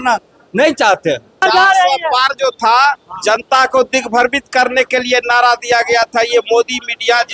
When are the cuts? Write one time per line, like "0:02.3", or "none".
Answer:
0:01.4